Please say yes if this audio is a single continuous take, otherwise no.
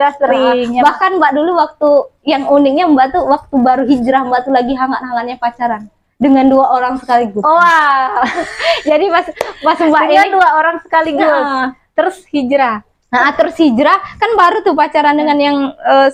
yes